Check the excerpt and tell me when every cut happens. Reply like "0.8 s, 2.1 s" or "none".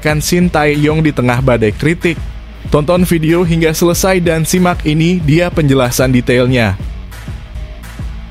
7.0 s